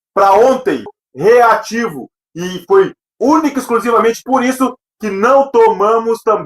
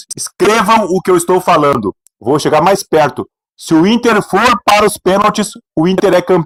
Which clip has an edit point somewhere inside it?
first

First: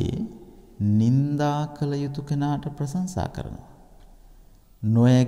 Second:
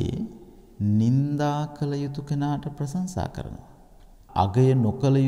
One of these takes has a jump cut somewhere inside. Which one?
second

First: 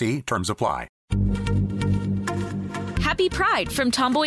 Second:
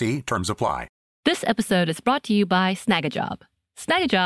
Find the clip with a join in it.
first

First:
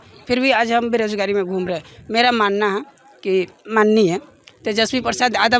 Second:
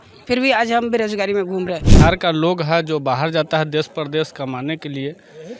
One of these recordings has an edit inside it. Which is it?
second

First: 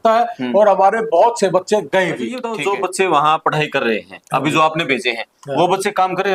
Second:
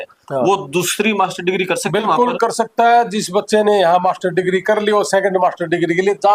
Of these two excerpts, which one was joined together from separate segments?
first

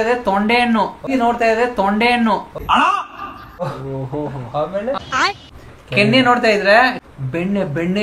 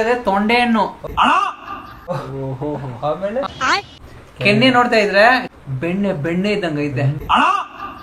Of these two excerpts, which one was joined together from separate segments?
second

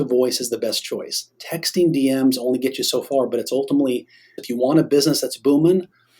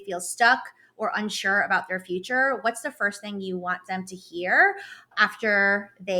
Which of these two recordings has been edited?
first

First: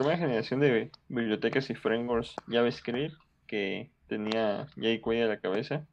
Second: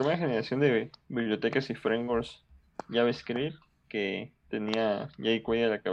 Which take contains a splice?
first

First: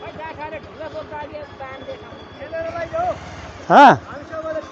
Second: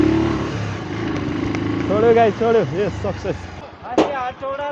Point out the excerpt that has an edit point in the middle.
second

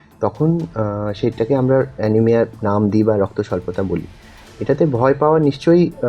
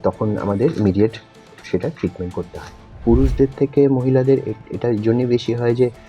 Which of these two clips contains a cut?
second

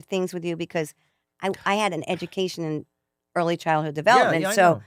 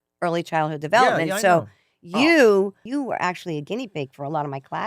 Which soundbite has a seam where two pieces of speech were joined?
second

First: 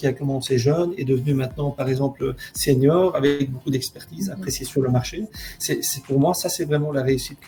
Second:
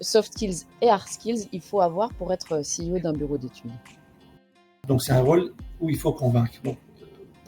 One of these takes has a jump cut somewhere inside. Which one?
second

